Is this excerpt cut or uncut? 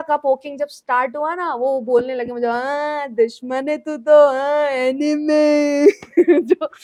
uncut